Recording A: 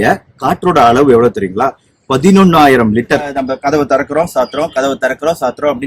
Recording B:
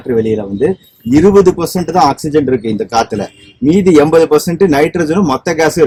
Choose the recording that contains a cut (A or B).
A